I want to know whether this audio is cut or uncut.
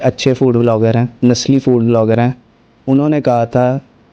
cut